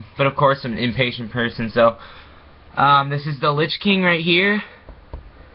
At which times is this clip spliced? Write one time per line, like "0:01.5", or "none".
0:01.2